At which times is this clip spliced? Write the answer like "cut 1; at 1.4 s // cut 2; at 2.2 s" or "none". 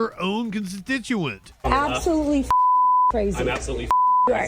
cut 1; at 1.4 s